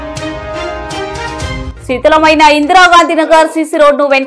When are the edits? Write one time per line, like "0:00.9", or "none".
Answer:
0:01.7